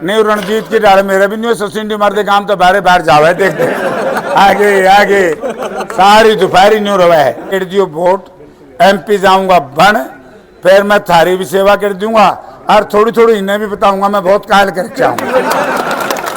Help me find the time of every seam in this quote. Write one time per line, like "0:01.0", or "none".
0:07.5